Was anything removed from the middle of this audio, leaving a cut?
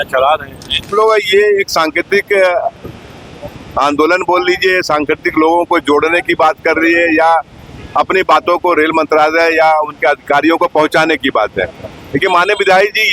yes; 1 cut; at 0.9 s

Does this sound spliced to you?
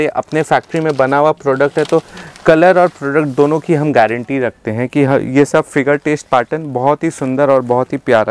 no; 0 cuts

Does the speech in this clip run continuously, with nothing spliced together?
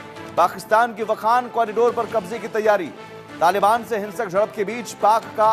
yes; 0 cuts

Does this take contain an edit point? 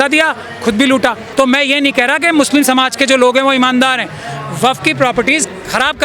yes; 1 cut; at 1.2 s

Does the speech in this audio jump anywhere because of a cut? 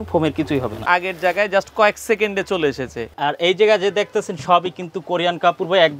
yes; 2 cuts; at 0.8 s, 3.0 s

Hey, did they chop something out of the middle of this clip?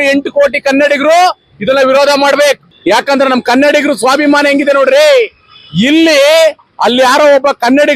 yes; 1 cut; at 2.7 s

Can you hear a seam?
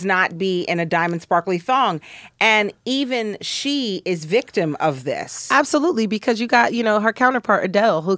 no; 0 cuts

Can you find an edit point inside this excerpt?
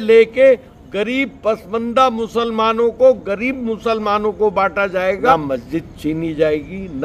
yes; 1 cut; at 5.3 s

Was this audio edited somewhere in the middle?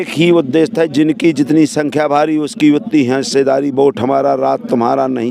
no; 0 cuts

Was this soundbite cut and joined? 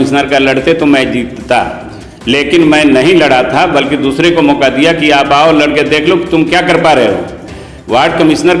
no; 0 cuts

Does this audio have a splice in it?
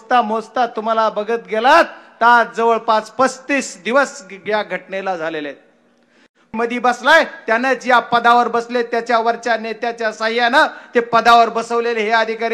yes; 1 cut; at 6.5 s

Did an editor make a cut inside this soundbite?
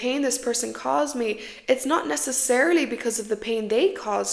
no; 0 cuts

